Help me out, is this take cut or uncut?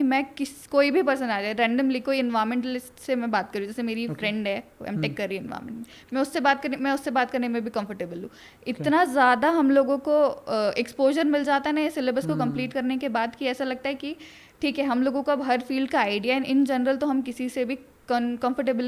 uncut